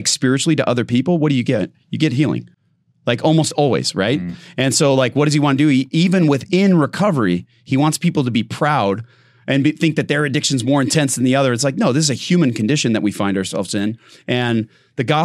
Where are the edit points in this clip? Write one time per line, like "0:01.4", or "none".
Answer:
none